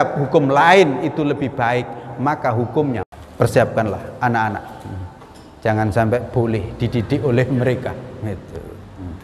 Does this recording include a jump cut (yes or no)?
yes